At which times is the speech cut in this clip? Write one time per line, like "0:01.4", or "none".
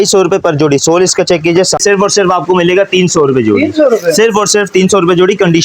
0:01.8